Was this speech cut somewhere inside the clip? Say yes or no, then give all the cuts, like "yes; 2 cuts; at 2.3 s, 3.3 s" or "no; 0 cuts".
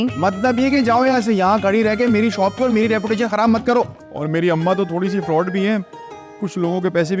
yes; 1 cut; at 4.0 s